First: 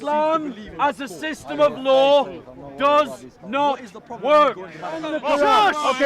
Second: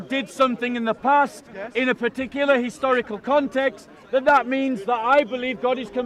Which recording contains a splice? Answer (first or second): first